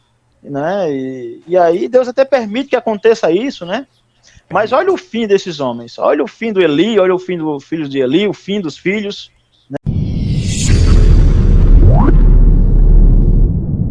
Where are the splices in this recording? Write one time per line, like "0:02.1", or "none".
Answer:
0:09.8